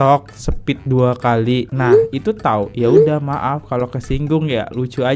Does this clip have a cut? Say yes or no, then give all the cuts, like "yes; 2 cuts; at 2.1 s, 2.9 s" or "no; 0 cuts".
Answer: no; 0 cuts